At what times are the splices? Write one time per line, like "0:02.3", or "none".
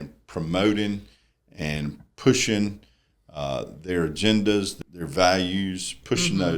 0:04.8